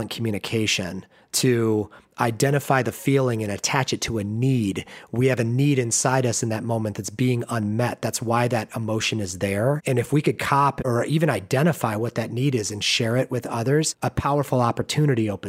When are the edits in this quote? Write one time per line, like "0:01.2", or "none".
0:10.8
0:13.9